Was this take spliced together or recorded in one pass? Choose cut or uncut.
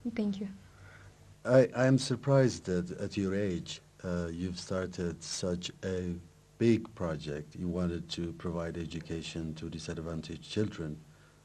uncut